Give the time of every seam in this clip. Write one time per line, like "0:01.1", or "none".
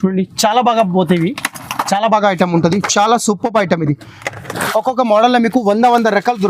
0:04.4